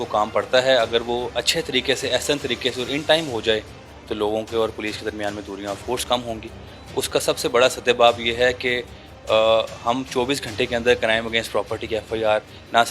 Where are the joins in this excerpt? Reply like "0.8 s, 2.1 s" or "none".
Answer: none

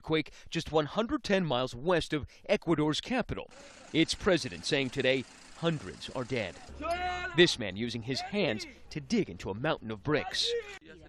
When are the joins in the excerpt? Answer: 9.8 s

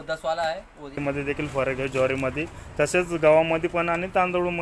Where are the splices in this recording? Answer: 1.0 s

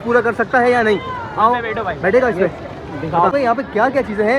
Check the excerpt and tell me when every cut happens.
3.3 s

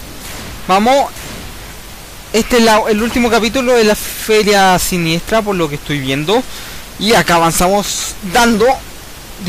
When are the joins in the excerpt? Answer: 4.6 s

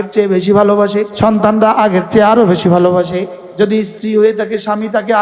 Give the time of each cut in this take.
1.1 s, 3.4 s

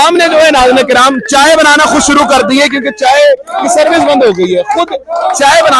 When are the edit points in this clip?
none

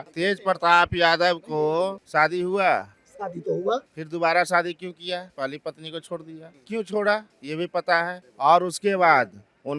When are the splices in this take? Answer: 8.3 s

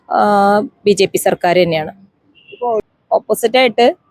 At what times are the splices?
2.8 s

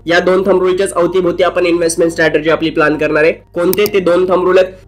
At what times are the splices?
none

